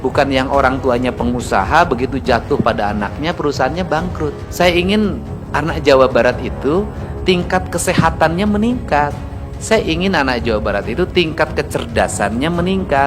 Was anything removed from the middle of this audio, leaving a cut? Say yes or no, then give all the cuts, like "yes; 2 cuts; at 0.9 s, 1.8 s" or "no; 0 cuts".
yes; 1 cut; at 4.4 s